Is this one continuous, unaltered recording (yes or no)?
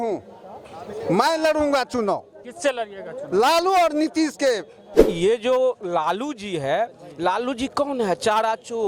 no